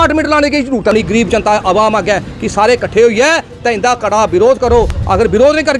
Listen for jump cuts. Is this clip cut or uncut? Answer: cut